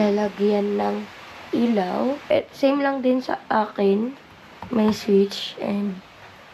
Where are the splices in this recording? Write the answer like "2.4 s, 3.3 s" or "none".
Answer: 2.3 s